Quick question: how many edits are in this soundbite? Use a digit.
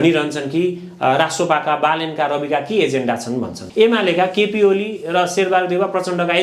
1